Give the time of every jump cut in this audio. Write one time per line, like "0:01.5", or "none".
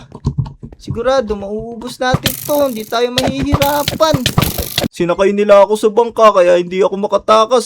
0:04.9